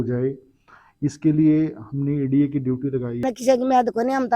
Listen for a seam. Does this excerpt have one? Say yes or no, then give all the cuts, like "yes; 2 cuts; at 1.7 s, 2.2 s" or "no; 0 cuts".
yes; 1 cut; at 3.2 s